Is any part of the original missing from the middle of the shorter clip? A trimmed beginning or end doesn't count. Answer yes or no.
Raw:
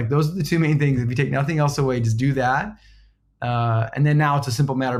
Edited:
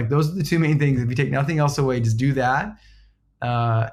no